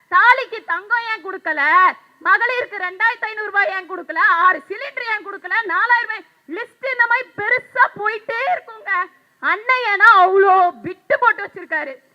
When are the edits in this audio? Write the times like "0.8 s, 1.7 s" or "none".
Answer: none